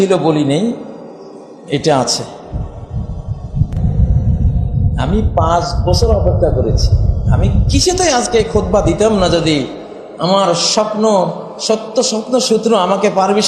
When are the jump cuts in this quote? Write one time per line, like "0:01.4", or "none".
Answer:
0:03.8